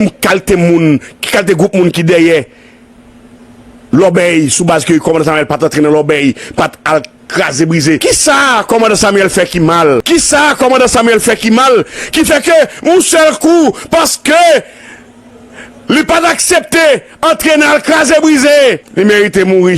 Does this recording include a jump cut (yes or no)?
yes